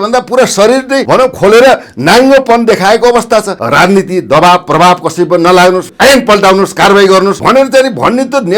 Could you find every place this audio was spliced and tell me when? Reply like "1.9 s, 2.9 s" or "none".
1.0 s, 3.6 s, 5.9 s, 7.4 s